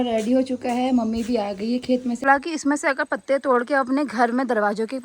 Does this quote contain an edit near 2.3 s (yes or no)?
yes